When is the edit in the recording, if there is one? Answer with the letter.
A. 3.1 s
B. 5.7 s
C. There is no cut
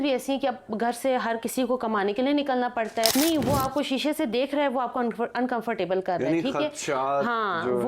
A